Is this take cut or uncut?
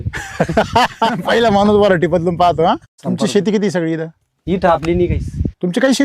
cut